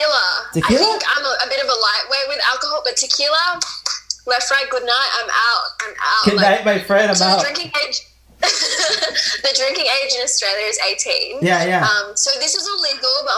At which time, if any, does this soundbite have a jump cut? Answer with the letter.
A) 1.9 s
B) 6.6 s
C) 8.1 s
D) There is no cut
D